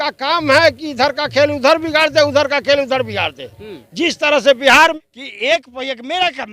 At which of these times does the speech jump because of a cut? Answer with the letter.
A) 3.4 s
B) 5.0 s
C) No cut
B